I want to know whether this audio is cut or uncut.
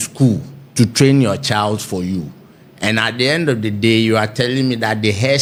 uncut